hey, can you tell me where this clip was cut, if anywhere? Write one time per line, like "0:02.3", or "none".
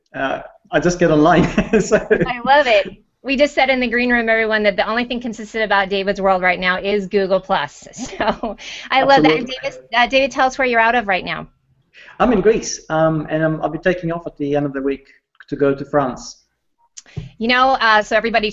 0:01.3